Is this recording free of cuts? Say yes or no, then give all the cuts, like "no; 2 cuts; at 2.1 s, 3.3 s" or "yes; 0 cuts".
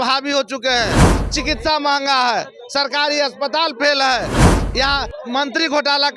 yes; 0 cuts